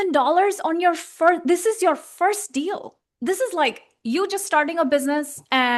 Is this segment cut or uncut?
uncut